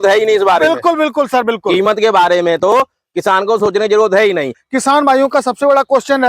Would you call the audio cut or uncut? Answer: cut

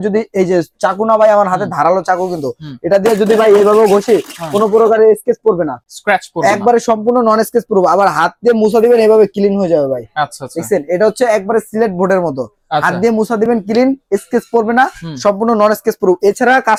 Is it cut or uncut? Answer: uncut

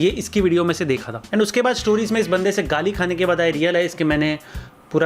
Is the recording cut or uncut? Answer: cut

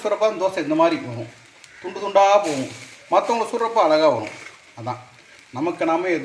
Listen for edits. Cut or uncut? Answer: uncut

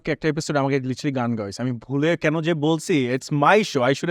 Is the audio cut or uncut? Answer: uncut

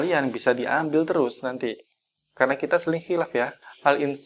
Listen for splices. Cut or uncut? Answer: uncut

